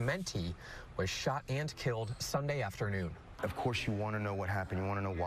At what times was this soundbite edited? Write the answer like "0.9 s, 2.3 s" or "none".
1.0 s